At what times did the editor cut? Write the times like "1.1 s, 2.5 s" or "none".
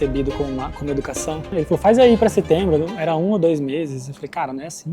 1.5 s